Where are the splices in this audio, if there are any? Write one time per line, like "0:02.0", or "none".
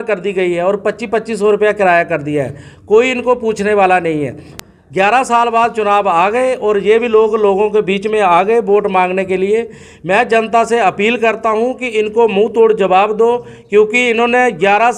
0:04.5

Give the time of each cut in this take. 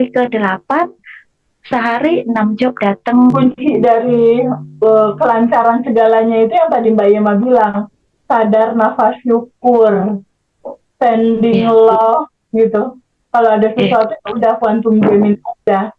0:03.3

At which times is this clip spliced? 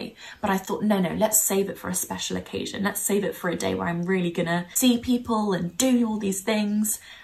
0:04.7

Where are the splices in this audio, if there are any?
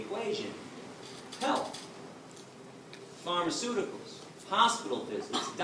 0:02.6

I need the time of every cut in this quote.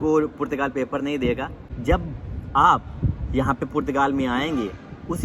0:01.7

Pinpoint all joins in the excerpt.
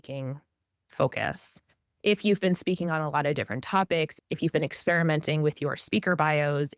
0:04.2

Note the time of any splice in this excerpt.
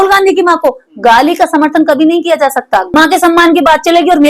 0:02.9

